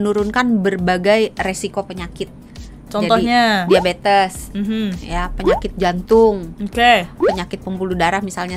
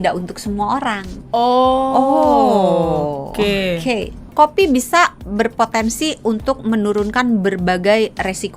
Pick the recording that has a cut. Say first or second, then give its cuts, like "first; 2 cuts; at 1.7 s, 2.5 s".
second; 1 cut; at 4.3 s